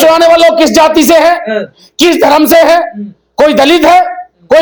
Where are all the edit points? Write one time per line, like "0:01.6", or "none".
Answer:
none